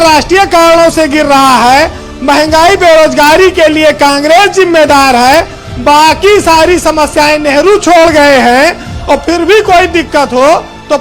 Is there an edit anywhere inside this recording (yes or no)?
no